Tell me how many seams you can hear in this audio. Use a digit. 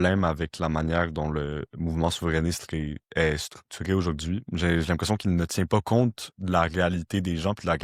0